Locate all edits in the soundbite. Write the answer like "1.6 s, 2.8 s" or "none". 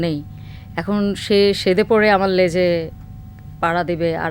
none